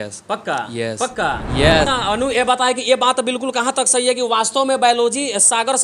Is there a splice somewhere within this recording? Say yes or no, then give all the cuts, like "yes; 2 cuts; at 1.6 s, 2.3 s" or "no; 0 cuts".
yes; 1 cut; at 1.9 s